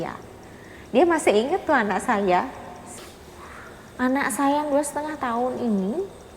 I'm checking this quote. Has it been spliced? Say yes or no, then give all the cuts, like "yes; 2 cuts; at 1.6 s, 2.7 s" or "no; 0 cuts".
yes; 1 cut; at 3.0 s